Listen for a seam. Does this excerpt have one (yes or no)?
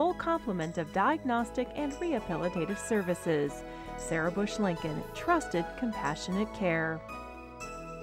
yes